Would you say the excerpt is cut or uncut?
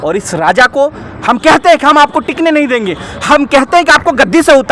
uncut